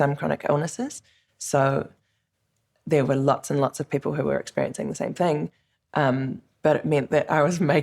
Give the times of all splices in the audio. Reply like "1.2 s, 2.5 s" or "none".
6.4 s